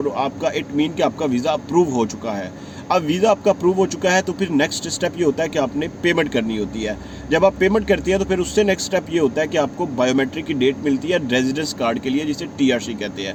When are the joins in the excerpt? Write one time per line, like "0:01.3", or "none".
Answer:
none

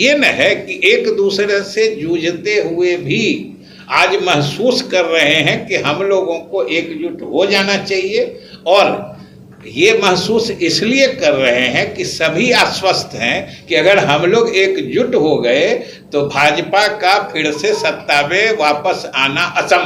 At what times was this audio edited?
none

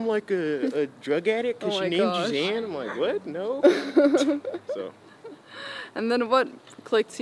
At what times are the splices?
none

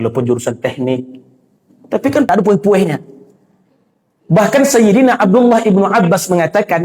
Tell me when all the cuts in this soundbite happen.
0:02.3

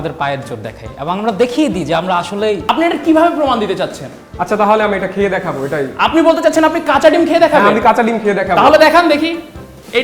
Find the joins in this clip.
0:02.6

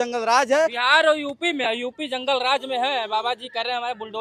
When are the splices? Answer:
none

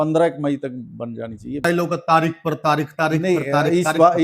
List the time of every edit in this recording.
0:01.7

